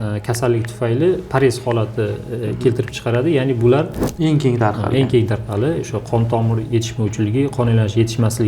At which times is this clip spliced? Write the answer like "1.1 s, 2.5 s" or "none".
4.0 s